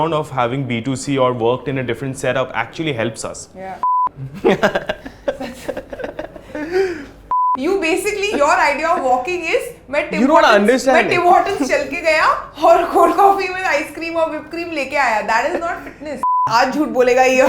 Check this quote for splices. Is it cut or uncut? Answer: cut